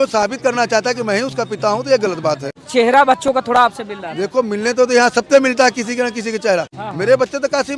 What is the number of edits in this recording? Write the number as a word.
two